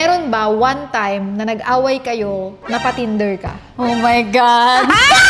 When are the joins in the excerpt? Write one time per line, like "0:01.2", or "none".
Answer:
0:03.6